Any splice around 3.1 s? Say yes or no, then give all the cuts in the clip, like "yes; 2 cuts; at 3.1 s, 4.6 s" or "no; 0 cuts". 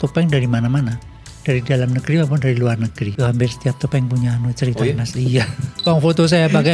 yes; 2 cuts; at 3.1 s, 5.7 s